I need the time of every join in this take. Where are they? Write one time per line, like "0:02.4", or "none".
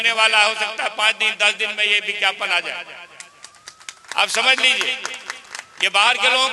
none